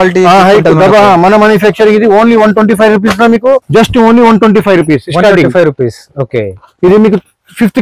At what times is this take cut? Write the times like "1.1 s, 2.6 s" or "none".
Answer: 3.6 s